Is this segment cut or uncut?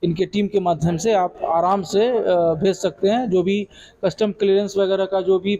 uncut